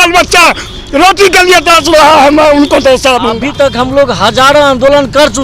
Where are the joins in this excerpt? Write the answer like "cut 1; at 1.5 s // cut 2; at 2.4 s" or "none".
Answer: cut 1; at 3.4 s